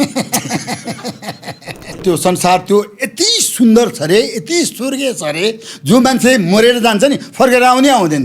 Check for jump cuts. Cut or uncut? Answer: cut